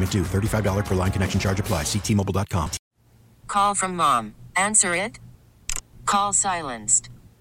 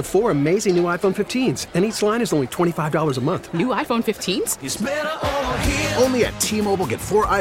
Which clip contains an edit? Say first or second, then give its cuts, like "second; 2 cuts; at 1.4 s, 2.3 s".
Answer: first; 1 cut; at 2.9 s